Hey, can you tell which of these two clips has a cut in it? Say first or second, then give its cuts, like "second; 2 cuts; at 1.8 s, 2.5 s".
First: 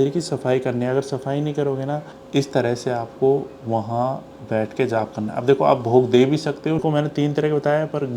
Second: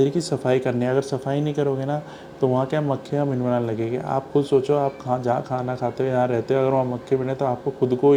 first; 2 cuts; at 2.1 s, 6.8 s